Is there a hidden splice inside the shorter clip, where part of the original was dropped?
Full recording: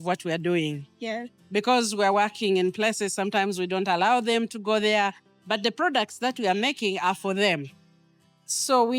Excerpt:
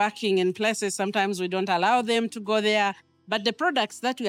no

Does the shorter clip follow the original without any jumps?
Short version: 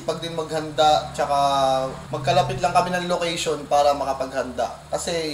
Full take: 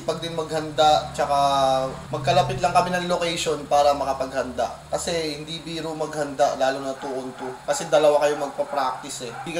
yes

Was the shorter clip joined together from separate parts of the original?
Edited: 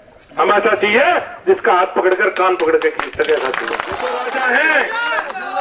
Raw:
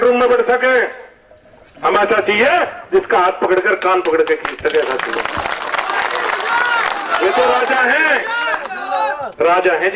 yes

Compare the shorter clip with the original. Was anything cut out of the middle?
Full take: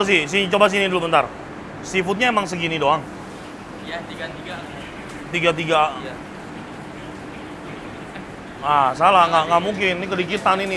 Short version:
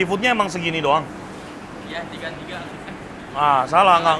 yes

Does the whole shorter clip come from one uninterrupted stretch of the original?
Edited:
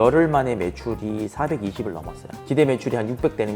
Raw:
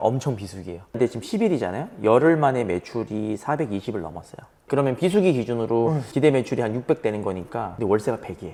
no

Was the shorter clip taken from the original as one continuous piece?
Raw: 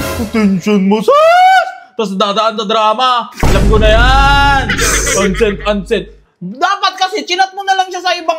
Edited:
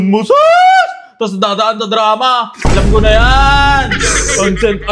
yes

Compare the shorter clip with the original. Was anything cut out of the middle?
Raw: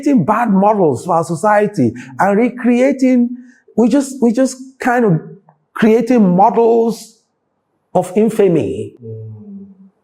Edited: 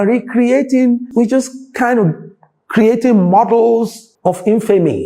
yes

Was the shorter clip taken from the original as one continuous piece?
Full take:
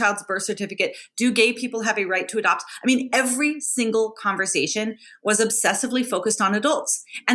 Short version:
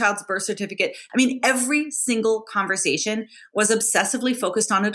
no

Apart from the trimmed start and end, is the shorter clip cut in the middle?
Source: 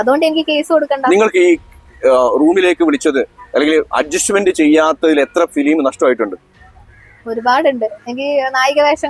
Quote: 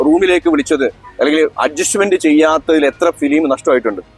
no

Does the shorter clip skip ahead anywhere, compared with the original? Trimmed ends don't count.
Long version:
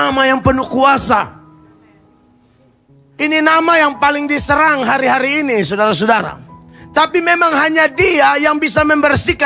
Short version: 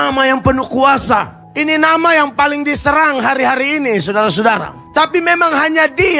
yes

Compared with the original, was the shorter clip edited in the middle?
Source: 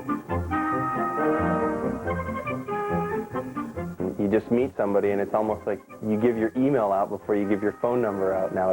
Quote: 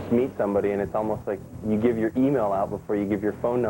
no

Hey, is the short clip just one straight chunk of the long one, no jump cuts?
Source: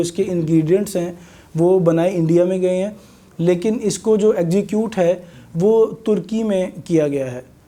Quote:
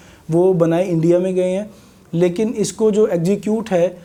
yes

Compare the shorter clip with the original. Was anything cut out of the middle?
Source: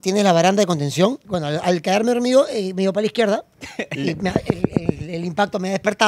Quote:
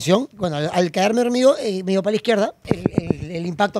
yes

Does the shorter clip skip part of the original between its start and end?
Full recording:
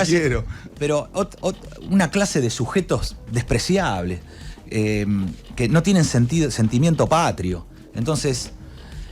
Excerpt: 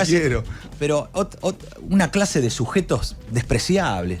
no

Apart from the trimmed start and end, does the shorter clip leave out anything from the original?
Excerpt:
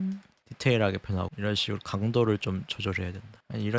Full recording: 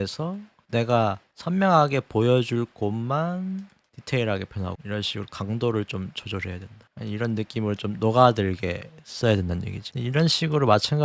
no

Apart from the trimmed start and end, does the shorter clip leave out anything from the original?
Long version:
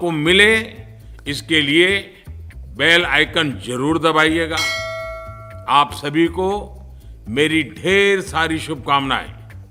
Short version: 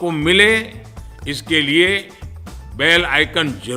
no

